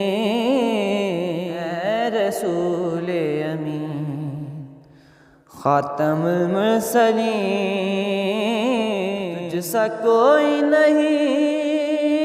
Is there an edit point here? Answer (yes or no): yes